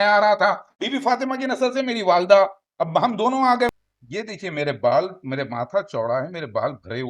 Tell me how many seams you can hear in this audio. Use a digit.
1